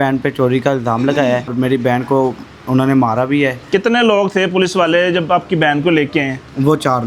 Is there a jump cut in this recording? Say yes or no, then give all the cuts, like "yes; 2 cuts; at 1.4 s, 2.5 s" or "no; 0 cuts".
yes; 1 cut; at 1.5 s